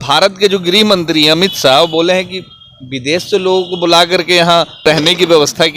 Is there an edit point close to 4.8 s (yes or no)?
yes